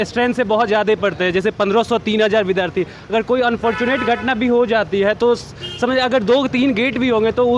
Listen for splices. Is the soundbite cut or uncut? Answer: uncut